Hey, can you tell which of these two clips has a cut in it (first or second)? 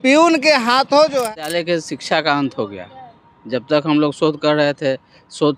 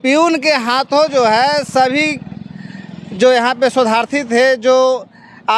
first